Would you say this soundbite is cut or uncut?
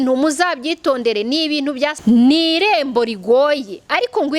cut